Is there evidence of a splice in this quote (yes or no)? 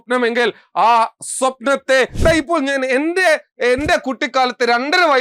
yes